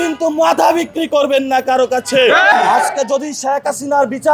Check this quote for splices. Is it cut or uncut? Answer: cut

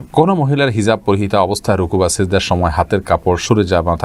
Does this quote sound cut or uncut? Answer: uncut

